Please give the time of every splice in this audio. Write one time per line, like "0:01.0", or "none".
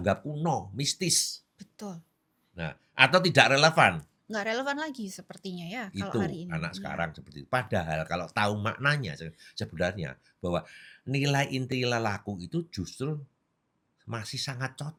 none